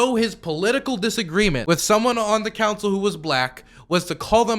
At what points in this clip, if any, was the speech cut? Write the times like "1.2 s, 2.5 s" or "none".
1.6 s